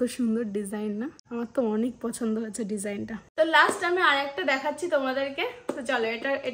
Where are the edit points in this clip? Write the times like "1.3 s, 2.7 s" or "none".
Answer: 1.2 s, 3.2 s